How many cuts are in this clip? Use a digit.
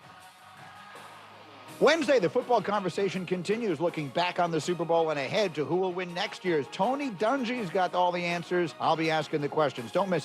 1